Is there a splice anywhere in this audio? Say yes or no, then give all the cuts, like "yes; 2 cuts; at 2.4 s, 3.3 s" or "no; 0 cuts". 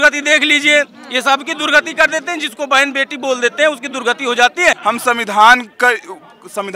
yes; 1 cut; at 4.8 s